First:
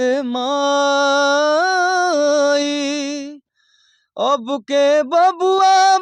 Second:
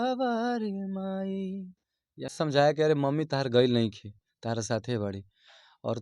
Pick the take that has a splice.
second; 1 cut; at 2.3 s

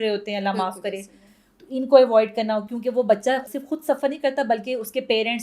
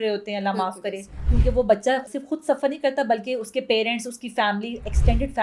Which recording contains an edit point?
second; 1 cut; at 1.3 s

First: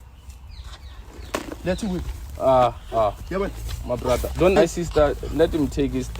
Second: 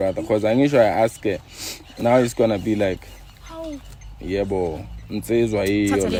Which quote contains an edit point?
first; 1 cut; at 4.6 s

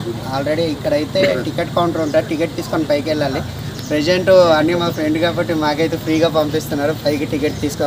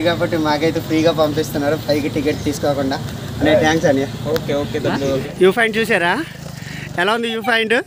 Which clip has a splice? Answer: second; 1 cut; at 5.1 s

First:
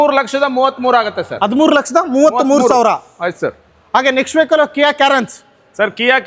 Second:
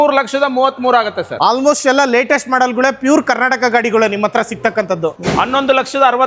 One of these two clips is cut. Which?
second; 2 cuts; at 1.3 s, 5.2 s

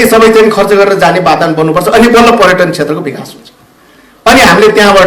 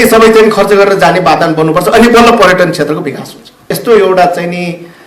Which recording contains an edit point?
second; 1 cut; at 3.7 s

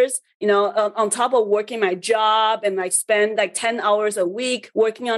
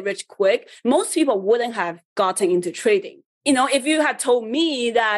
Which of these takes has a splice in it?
second; 1 cut; at 3.3 s

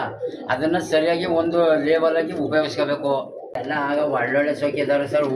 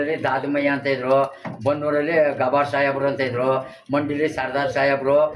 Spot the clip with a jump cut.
first; 1 cut; at 3.6 s

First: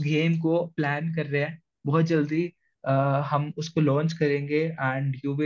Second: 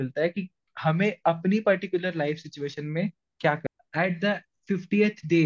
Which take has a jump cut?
second; 1 cut; at 3.6 s

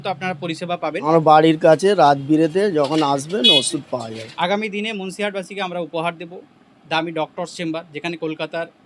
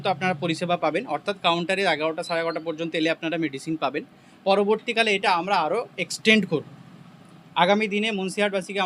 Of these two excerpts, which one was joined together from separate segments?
first; 2 cuts; at 0.9 s, 4.2 s

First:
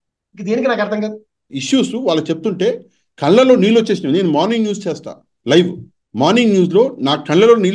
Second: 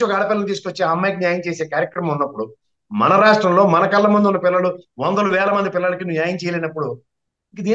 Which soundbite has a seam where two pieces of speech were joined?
first; 1 cut; at 1.5 s

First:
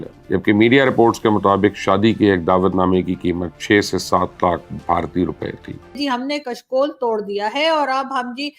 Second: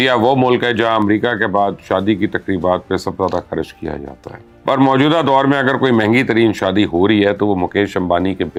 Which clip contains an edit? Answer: first; 1 cut; at 5.9 s

